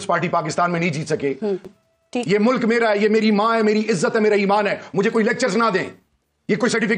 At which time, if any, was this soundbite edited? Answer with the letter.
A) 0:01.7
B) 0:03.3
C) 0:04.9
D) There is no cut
A